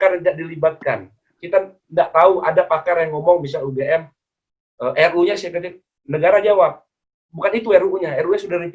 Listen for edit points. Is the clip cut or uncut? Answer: uncut